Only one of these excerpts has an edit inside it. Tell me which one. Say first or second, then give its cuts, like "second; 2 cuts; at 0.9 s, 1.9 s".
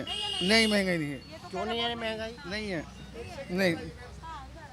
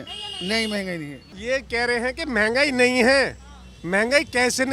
second; 1 cut; at 1.2 s